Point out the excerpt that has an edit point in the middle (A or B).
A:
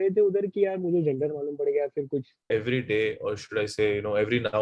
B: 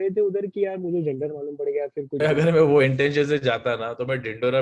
A